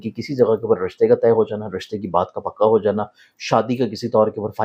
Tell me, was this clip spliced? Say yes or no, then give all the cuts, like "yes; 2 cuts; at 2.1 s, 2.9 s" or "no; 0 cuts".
no; 0 cuts